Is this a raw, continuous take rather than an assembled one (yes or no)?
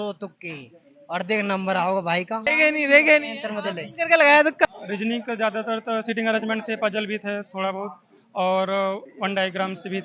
no